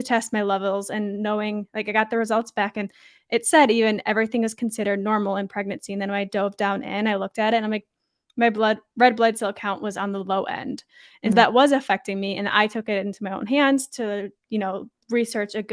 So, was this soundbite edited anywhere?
no; 0 cuts

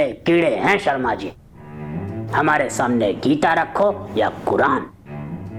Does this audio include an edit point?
no; 0 cuts

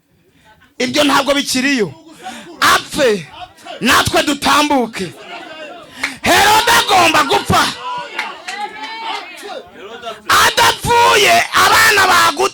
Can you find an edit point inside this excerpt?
no; 0 cuts

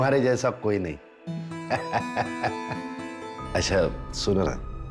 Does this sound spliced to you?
no; 0 cuts

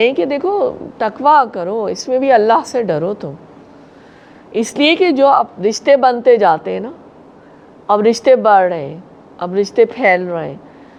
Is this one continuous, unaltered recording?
yes; 0 cuts

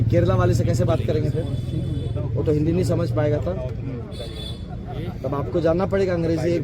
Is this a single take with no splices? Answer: yes; 0 cuts

